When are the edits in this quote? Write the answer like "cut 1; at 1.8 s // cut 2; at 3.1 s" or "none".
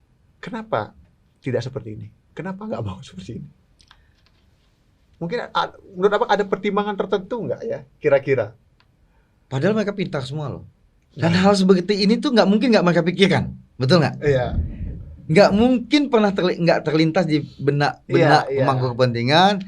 none